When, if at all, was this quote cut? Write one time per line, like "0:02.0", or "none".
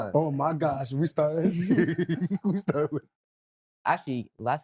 0:03.7